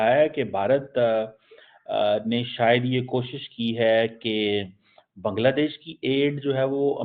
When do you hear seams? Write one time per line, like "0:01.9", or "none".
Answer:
none